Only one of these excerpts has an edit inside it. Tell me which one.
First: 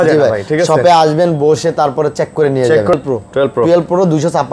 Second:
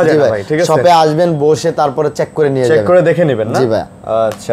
first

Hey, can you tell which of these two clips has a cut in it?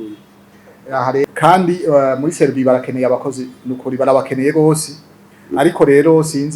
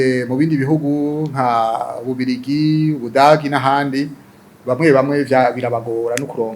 first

